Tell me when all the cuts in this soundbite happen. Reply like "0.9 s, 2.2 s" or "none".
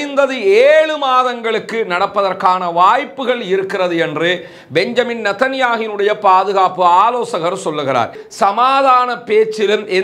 8.2 s